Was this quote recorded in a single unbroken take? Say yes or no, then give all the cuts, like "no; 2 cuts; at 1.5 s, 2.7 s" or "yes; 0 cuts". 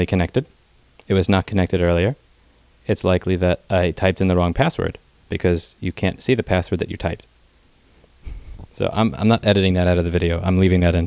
yes; 0 cuts